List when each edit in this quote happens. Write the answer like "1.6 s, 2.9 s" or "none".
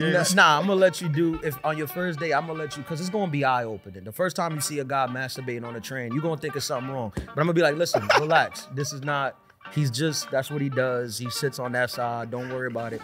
none